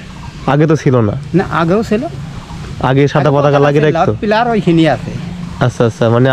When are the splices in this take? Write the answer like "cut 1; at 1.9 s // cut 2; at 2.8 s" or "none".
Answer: none